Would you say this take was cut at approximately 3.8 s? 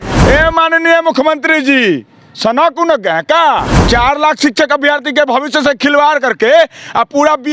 yes; 1 cut; at 3.8 s

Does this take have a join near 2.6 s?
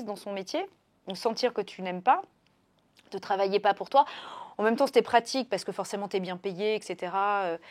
no; 0 cuts

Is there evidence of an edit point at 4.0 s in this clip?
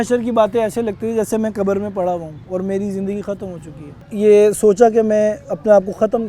yes; 1 cut; at 4.0 s

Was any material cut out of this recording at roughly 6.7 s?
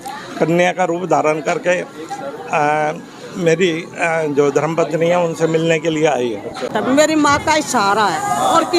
yes; 1 cut; at 6.7 s

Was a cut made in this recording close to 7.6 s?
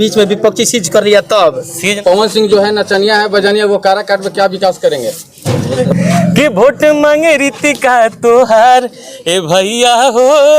no; 2 cuts; at 2.0 s, 5.8 s

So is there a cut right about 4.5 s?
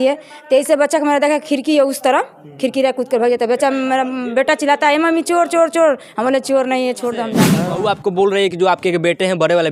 no; 1 cut; at 7.4 s

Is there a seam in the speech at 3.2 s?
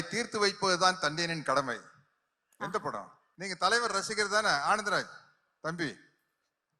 yes; 1 cut; at 3.2 s

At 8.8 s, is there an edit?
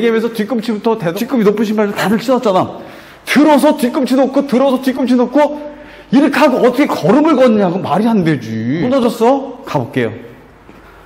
yes; 2 cuts; at 1.1 s, 8.8 s

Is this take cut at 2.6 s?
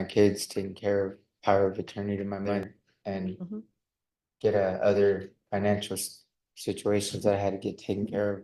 yes; 1 cut; at 2.6 s

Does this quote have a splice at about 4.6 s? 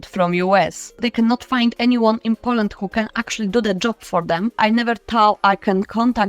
yes; 2 cuts; at 1.0 s, 4.6 s

